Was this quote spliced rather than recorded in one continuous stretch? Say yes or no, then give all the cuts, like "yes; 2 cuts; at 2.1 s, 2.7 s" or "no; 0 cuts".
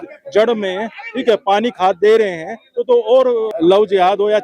yes; 1 cut; at 3.5 s